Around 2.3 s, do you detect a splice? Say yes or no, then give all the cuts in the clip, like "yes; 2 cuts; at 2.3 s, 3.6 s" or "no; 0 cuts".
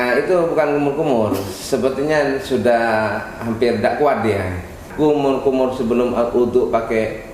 no; 1 cut; at 4.8 s